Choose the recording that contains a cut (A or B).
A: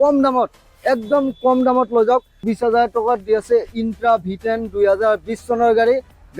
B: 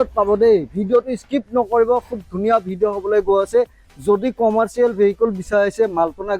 A